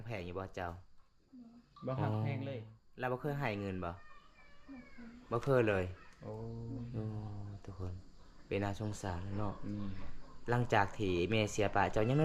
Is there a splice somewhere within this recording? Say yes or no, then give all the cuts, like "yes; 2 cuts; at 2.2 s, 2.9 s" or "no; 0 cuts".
no; 0 cuts